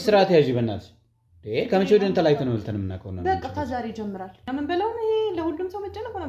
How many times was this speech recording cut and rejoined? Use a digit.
1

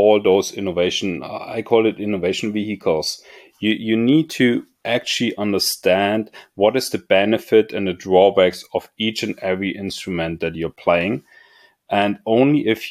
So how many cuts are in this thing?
0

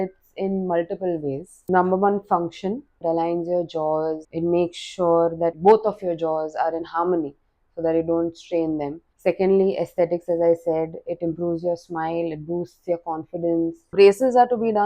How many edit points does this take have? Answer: 6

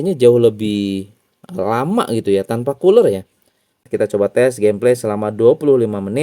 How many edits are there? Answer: 1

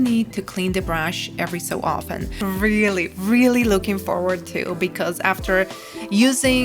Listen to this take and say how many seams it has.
1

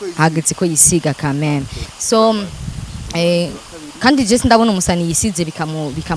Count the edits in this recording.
1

